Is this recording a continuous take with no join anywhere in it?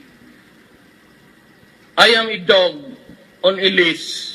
no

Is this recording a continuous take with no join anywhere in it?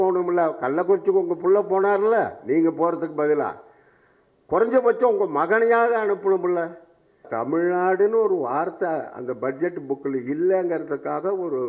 no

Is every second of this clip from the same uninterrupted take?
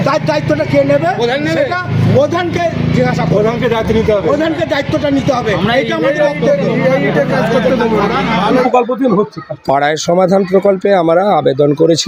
no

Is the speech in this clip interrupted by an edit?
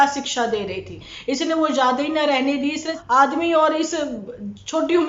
yes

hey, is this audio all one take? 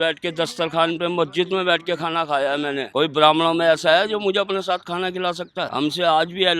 no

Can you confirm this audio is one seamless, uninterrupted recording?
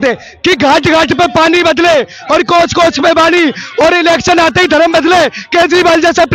yes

